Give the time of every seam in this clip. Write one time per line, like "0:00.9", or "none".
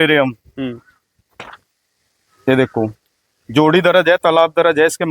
none